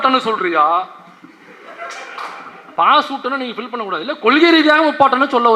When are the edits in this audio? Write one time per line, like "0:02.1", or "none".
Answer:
0:02.6